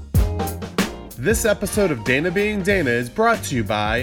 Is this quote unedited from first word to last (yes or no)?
no